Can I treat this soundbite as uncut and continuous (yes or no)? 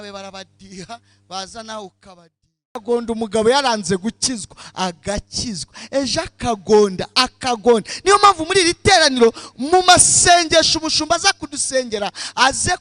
no